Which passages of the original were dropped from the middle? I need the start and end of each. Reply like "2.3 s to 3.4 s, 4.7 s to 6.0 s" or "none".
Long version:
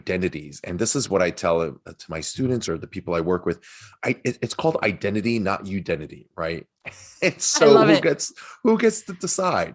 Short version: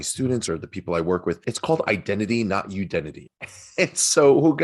3.7 s to 4.5 s, 6.2 s to 6.7 s